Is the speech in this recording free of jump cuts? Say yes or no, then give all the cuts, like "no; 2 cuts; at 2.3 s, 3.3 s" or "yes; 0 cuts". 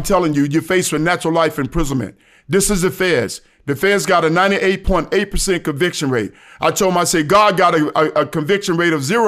yes; 0 cuts